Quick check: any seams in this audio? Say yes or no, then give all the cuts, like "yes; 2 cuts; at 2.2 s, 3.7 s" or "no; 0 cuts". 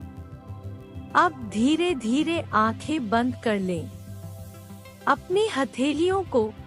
yes; 1 cut; at 1.1 s